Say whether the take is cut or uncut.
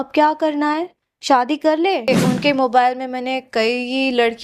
cut